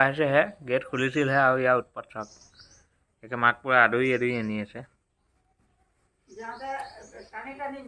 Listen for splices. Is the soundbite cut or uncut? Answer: uncut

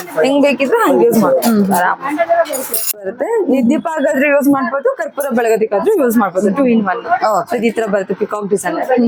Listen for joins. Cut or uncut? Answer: cut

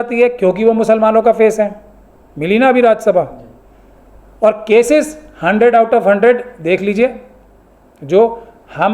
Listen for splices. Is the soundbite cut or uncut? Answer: uncut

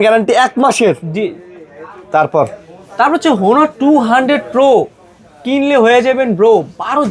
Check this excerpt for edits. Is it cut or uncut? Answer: uncut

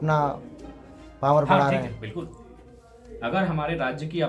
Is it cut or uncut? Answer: uncut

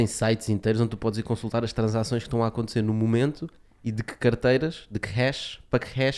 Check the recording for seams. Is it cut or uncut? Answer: uncut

